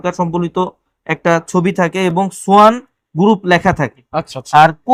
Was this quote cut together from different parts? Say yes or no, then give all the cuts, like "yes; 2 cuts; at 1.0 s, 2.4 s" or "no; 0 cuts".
no; 0 cuts